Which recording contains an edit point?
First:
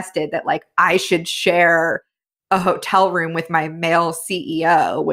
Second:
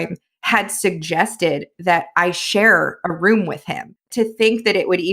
second; 1 cut; at 4.1 s

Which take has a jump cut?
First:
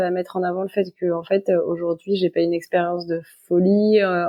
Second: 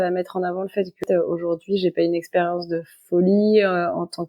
second; 1 cut; at 1.0 s

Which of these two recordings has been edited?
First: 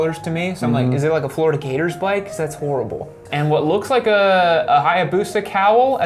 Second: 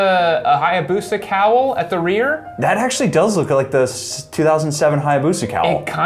first; 1 cut; at 3.3 s

